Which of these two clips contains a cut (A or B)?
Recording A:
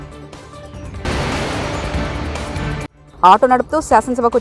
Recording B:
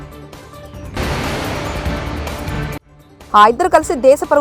B